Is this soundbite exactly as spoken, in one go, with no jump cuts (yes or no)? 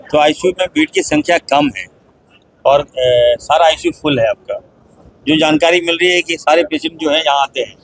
yes